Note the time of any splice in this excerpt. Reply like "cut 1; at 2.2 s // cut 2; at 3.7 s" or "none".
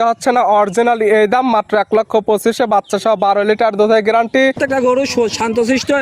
cut 1; at 4.6 s